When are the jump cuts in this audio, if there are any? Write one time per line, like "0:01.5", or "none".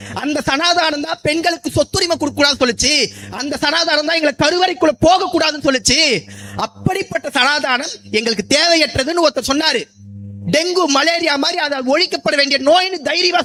none